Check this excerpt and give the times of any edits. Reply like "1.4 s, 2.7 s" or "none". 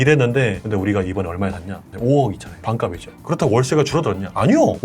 none